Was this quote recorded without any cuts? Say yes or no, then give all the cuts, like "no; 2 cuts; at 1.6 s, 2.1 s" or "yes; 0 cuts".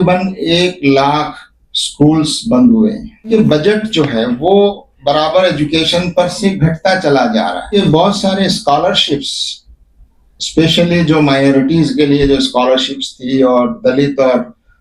no; 2 cuts; at 3.3 s, 7.7 s